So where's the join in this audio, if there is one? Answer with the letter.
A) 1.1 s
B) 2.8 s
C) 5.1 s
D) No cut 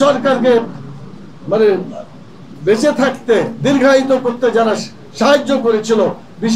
D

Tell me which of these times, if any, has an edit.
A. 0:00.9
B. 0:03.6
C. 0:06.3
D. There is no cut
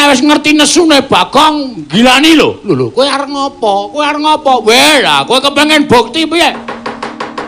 A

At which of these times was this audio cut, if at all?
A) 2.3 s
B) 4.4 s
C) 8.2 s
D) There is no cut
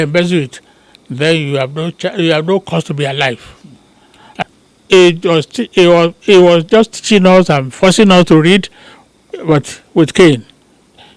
B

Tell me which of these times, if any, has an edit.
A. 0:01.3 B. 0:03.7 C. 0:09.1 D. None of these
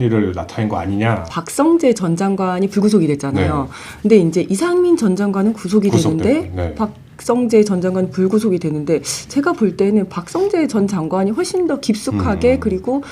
A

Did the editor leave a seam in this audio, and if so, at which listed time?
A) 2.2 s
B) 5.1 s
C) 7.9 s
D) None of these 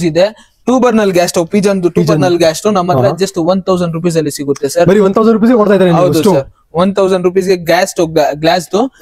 D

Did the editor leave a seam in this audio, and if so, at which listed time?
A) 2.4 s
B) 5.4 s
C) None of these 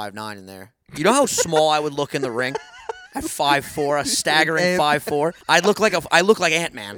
B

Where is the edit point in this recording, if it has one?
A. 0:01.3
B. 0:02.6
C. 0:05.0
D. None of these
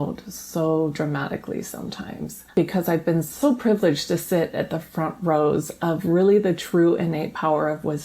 B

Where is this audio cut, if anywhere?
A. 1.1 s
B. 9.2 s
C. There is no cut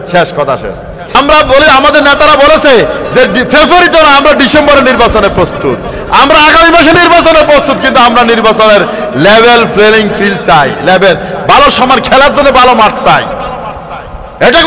A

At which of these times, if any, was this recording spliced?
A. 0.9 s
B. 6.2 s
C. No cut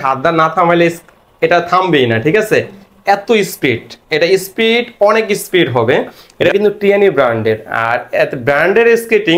B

